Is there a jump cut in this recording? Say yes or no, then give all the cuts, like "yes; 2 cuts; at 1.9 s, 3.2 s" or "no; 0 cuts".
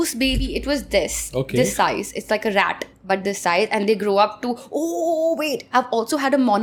no; 0 cuts